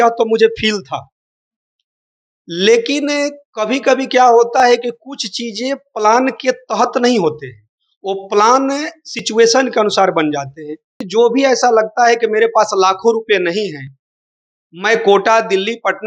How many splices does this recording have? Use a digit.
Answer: 1